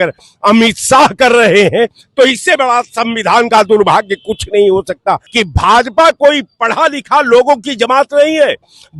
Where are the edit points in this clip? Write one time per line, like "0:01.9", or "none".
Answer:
0:05.3